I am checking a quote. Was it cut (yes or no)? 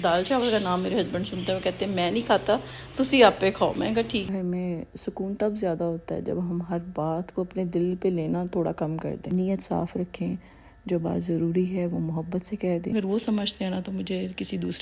yes